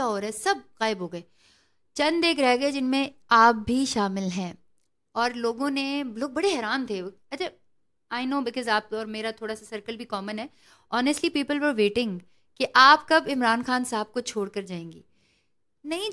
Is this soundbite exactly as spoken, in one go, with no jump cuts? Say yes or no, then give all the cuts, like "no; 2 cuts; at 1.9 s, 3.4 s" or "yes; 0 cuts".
yes; 0 cuts